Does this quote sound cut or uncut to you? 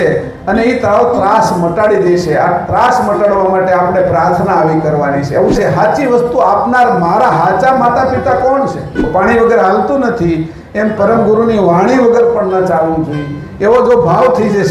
cut